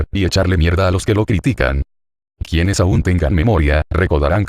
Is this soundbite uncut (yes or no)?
no